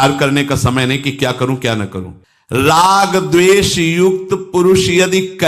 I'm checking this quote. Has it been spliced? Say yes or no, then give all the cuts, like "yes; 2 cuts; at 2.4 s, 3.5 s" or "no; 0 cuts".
no; 0 cuts